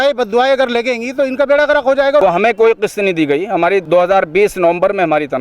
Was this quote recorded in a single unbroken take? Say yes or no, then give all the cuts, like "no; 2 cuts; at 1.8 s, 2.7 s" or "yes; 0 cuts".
no; 2 cuts; at 2.2 s, 3.8 s